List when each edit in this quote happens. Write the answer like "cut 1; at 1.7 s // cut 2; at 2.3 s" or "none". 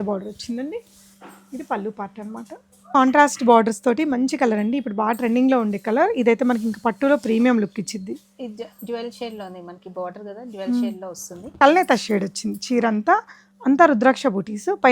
cut 1; at 2.9 s // cut 2; at 11.5 s